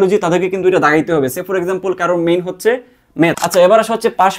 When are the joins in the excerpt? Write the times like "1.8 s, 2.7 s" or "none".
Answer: 3.4 s